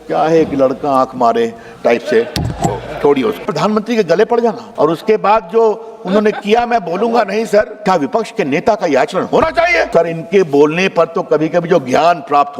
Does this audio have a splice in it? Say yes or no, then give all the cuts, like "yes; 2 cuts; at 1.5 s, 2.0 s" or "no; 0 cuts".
yes; 4 cuts; at 3.5 s, 4.6 s, 7.7 s, 9.9 s